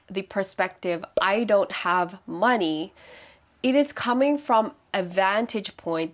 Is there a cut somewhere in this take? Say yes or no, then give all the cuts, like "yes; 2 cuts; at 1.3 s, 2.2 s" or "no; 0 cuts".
no; 0 cuts